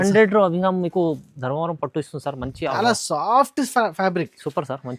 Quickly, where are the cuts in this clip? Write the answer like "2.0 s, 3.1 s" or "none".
2.7 s

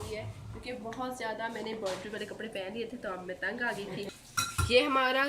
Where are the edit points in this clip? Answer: 4.1 s

